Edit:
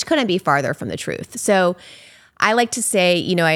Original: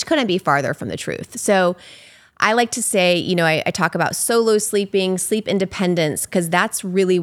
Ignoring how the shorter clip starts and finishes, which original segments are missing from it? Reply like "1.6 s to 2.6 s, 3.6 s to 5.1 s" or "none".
none